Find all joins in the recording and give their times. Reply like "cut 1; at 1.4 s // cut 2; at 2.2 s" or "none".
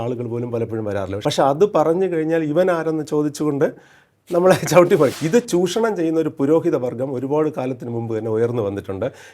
cut 1; at 1.1 s // cut 2; at 5.1 s